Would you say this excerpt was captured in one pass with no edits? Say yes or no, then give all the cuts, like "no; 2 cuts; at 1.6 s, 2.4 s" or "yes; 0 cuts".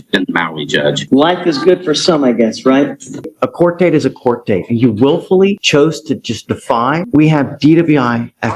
no; 3 cuts; at 1.0 s, 3.2 s, 7.0 s